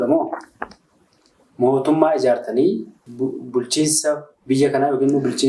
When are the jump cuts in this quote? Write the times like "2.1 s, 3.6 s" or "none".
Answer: 3.0 s